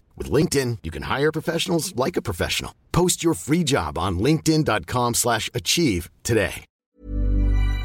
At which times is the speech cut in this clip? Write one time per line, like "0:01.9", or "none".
0:06.7